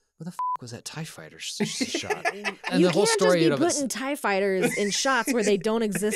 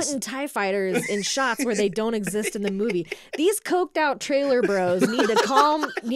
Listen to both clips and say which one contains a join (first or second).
first